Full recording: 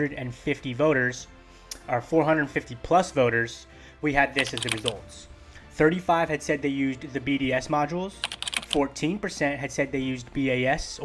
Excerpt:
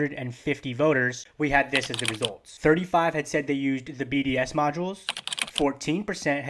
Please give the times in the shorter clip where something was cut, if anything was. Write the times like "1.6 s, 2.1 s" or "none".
1.2 s, 2.5 s